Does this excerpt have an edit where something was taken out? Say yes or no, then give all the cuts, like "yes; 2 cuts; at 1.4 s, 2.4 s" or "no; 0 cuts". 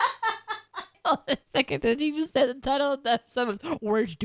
yes; 1 cut; at 1.0 s